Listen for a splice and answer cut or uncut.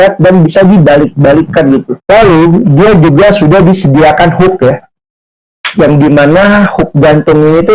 cut